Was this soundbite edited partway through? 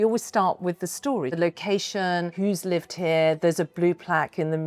yes; 2 cuts; at 1.4 s, 2.3 s

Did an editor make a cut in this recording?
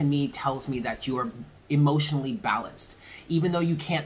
no; 0 cuts

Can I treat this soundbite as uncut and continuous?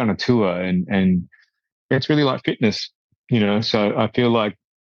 no; 1 cut; at 1.6 s

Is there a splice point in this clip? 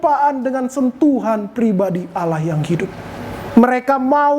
yes; 1 cut; at 3.5 s

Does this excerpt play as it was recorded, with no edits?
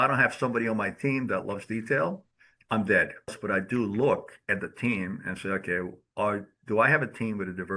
no; 1 cut; at 3.4 s

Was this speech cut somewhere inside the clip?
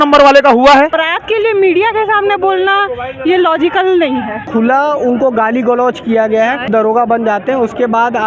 yes; 3 cuts; at 1.1 s, 4.4 s, 6.7 s

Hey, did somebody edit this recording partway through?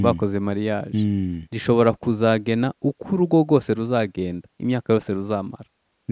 no; 0 cuts

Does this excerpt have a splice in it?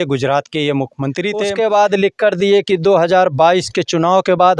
yes; 1 cut; at 1.5 s

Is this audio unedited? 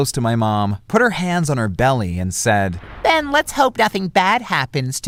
yes; 0 cuts

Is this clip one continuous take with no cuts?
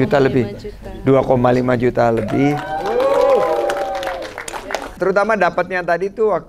no; 1 cut; at 4.8 s

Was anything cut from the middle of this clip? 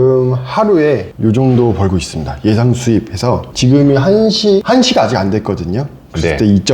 yes; 3 cuts; at 1.1 s, 3.5 s, 4.6 s

